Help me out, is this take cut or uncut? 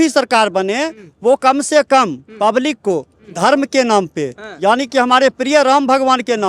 uncut